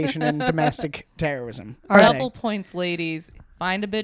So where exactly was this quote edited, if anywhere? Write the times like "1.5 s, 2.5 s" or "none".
1.9 s

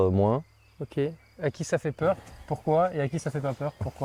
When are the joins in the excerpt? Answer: none

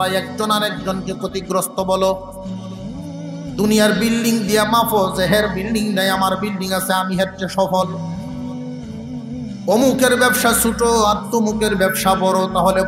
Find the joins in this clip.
none

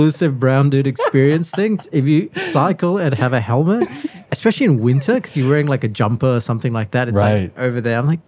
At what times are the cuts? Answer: 1.8 s

